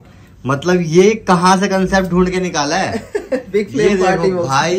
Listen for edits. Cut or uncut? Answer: uncut